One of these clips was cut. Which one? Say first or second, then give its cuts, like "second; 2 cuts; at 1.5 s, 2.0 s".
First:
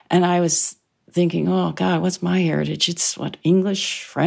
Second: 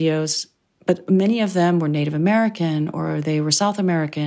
second; 1 cut; at 1.0 s